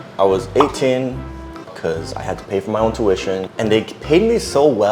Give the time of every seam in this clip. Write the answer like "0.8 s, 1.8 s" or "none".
1.7 s, 3.5 s